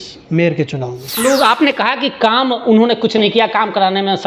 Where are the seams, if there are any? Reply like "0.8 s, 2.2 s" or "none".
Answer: 1.1 s